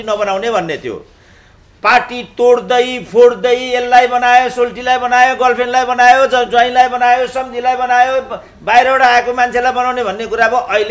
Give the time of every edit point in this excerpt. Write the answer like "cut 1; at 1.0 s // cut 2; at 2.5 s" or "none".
none